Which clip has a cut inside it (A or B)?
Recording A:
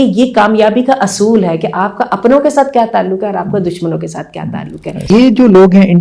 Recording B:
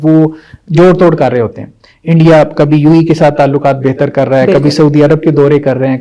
A